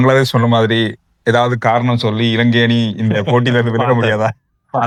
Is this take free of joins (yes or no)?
yes